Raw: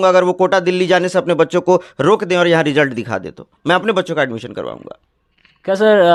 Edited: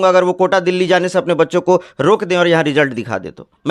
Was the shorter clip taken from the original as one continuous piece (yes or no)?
yes